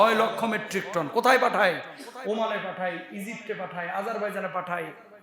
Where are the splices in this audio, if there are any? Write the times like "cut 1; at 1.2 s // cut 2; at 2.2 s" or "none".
none